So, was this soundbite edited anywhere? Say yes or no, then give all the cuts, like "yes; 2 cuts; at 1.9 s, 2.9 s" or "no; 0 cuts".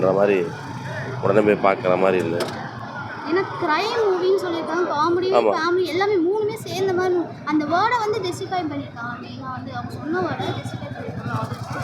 no; 0 cuts